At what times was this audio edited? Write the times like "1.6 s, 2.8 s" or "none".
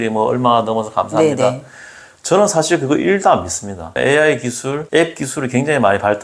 3.9 s, 4.8 s